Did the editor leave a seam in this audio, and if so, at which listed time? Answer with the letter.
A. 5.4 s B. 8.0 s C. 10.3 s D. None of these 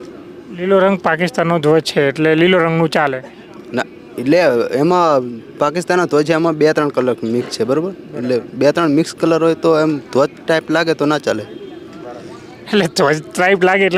D